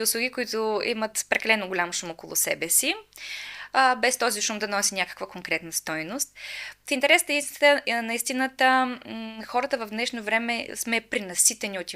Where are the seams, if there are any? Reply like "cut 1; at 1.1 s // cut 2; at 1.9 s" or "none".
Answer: none